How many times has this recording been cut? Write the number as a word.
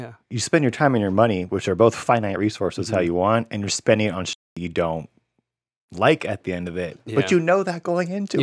zero